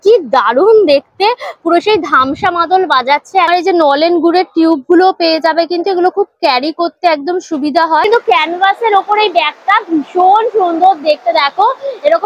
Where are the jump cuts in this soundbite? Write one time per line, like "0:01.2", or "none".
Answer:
0:03.5
0:08.1